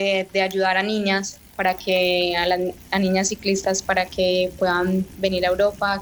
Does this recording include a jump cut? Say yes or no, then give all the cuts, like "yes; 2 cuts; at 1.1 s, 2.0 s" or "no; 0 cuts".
no; 0 cuts